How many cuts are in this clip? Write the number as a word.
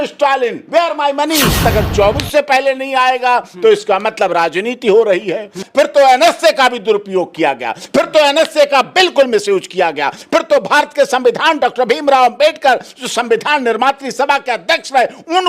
two